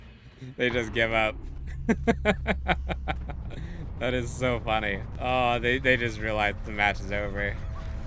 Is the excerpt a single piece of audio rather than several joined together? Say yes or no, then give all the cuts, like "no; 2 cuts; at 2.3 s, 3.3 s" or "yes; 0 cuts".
no; 1 cut; at 5.1 s